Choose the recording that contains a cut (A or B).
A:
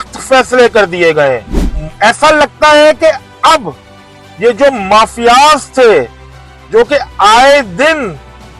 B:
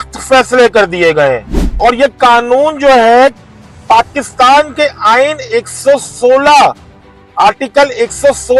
A